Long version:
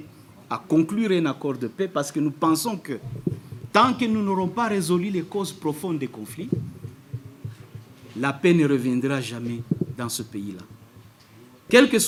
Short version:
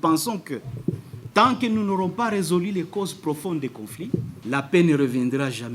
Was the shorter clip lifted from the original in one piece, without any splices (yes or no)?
no